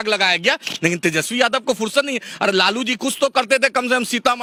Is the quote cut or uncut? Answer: uncut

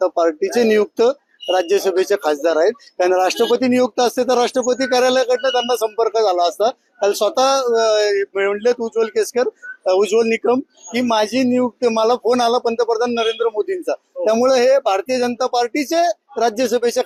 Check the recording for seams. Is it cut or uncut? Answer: uncut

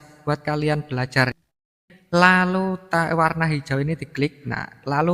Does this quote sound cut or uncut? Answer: cut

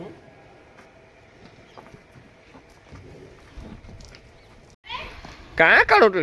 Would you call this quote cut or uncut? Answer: cut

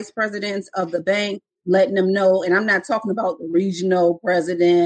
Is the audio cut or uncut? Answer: uncut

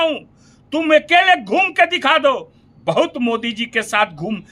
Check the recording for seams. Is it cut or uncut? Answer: uncut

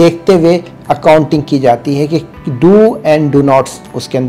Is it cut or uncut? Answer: uncut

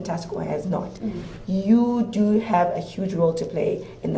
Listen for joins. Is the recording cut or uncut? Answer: uncut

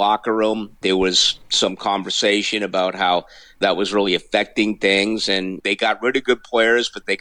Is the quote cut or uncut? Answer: cut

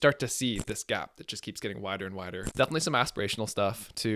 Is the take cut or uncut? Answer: cut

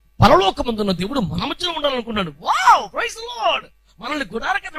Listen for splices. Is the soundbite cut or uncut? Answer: uncut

